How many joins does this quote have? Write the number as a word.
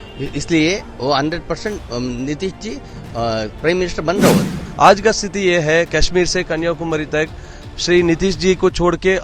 one